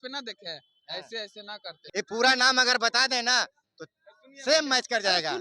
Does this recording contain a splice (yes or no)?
yes